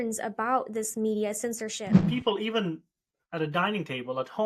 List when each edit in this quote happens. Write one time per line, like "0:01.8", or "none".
0:01.9